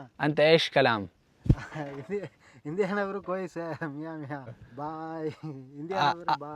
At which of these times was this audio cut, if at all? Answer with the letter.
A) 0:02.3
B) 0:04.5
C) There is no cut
B